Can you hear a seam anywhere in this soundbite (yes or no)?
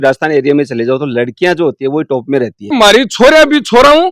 yes